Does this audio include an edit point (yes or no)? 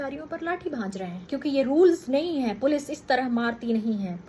yes